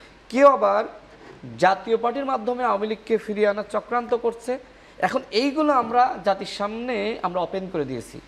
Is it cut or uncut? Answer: uncut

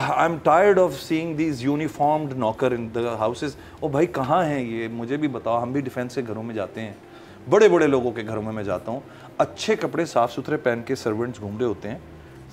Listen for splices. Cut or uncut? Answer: uncut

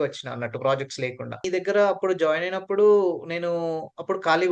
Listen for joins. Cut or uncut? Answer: cut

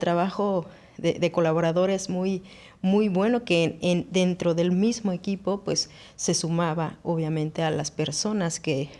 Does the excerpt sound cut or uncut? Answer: uncut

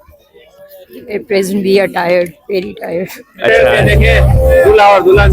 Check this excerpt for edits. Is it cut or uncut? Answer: cut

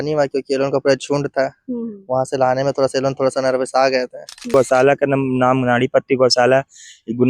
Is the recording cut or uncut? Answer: cut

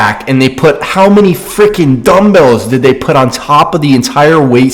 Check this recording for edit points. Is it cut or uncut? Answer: uncut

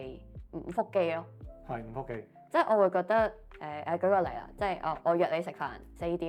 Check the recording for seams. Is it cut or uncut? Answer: uncut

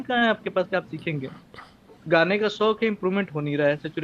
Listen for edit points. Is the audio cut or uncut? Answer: cut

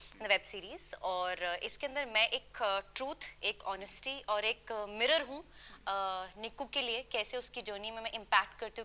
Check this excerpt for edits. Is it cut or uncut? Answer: uncut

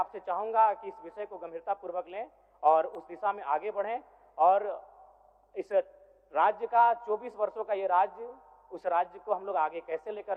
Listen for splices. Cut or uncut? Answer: uncut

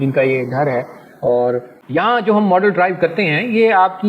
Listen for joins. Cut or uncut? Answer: cut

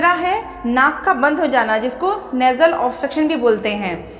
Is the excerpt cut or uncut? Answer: uncut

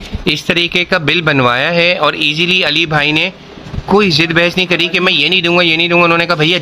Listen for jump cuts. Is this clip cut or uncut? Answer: uncut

